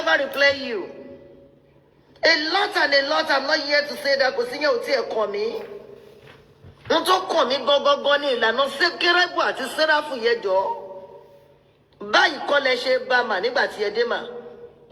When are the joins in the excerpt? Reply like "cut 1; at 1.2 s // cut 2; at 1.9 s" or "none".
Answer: cut 1; at 2.1 s